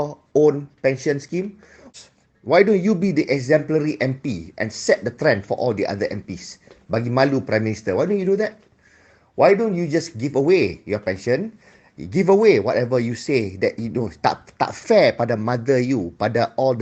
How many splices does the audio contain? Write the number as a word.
one